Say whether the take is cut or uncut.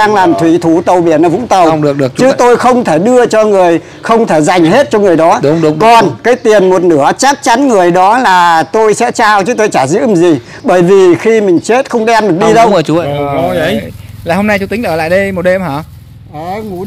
cut